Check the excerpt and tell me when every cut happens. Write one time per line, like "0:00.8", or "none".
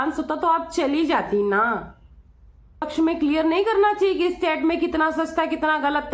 0:02.9